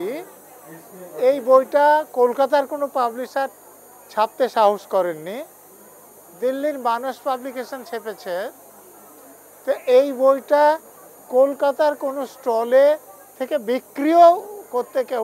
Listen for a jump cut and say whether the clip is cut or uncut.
uncut